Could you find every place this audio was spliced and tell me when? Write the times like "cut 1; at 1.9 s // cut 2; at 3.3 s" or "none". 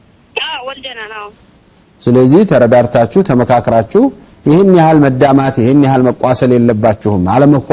none